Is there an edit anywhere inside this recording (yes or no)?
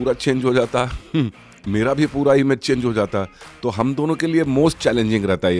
no